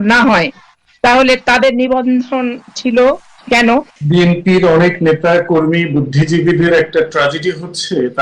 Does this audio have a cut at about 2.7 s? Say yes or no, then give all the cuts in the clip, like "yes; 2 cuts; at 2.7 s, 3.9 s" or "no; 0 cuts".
no; 1 cut; at 4.0 s